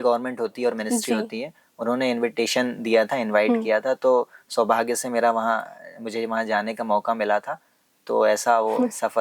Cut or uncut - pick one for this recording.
uncut